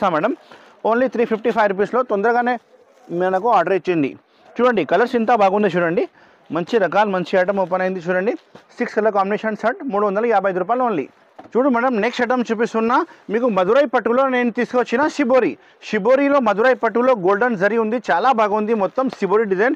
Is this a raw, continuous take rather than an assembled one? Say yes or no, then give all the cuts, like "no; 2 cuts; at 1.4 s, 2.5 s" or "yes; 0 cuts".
yes; 0 cuts